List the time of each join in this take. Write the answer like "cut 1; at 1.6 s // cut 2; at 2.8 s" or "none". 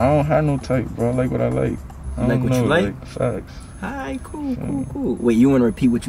none